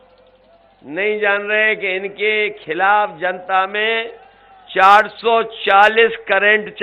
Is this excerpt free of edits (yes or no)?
yes